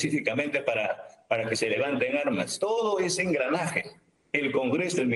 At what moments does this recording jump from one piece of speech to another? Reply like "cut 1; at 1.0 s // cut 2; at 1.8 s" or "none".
cut 1; at 2.5 s

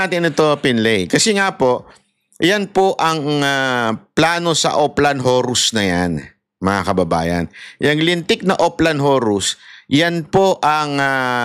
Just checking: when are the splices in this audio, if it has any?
none

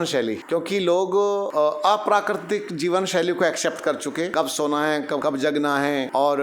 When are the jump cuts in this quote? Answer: cut 1; at 1.5 s // cut 2; at 4.3 s // cut 3; at 5.5 s

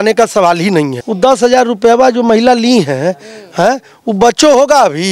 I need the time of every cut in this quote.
cut 1; at 1.0 s

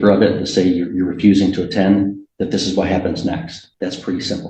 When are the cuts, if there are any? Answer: cut 1; at 3.6 s

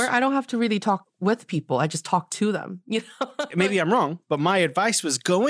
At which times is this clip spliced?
cut 1; at 3.5 s

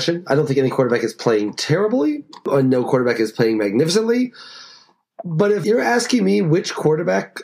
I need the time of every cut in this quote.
cut 1; at 2.4 s // cut 2; at 5.6 s

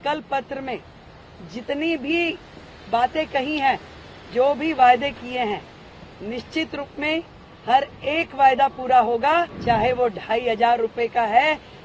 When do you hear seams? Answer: cut 1; at 9.5 s

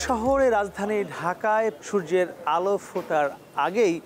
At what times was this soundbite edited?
cut 1; at 1.8 s

